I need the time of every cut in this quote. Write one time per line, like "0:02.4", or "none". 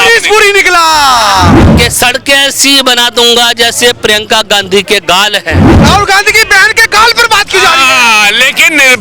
0:01.6
0:05.8

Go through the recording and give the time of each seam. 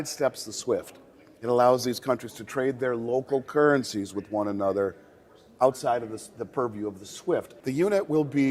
0:07.5

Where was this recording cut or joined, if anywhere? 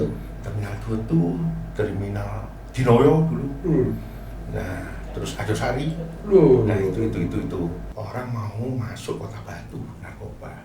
0:07.9

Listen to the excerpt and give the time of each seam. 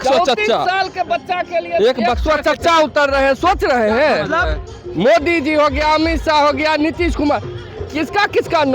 none

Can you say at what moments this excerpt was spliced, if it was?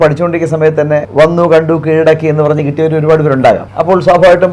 0:01.1
0:03.7

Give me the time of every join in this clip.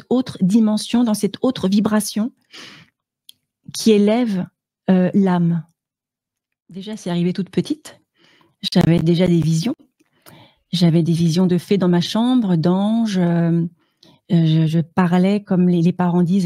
0:06.9

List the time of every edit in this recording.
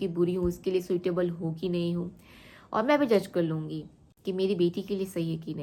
none

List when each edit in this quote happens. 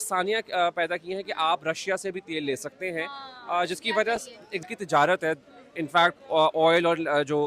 0:04.6

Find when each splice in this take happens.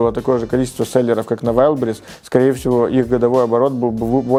none

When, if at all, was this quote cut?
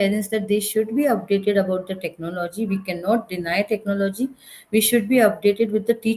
none

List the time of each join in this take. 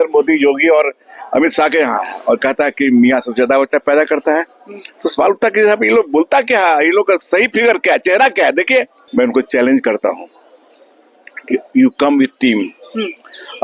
0:09.0

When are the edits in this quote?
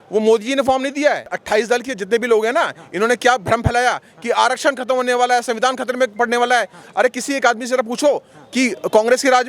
0:01.3

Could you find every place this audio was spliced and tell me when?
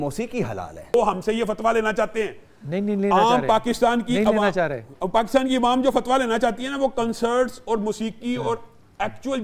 0:00.9

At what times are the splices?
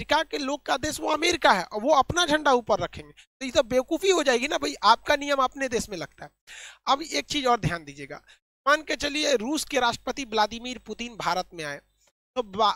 none

